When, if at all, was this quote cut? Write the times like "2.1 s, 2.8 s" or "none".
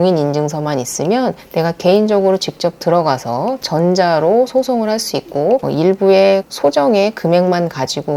5.7 s